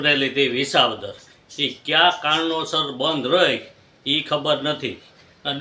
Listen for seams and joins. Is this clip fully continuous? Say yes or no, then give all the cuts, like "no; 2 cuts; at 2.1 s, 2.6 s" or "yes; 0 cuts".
yes; 0 cuts